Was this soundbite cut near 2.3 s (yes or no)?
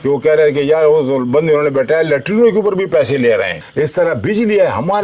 no